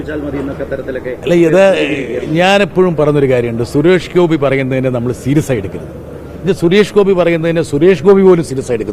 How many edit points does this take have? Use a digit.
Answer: 1